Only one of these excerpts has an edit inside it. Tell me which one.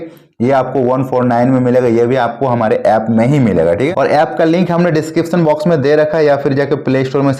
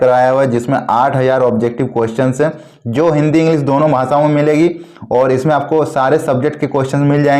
first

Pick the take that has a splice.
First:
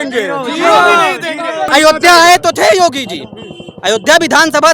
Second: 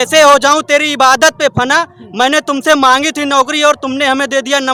first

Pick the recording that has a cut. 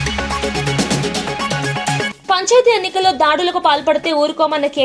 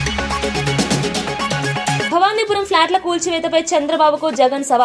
second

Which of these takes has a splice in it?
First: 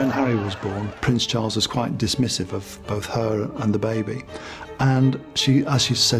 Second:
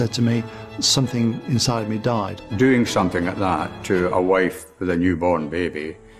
second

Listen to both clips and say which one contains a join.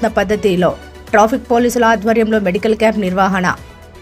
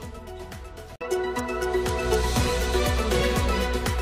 second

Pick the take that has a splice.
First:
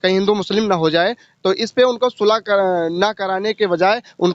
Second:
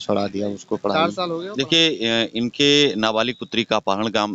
second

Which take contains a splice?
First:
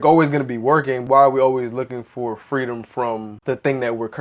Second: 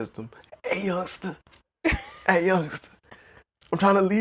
first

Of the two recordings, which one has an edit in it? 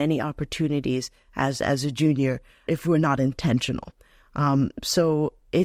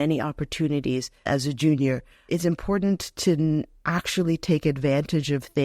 second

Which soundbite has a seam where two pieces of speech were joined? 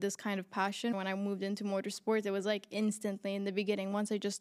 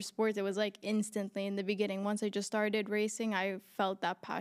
first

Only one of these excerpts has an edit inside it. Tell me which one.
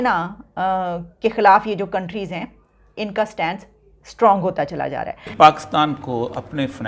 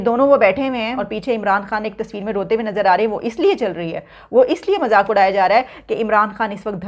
first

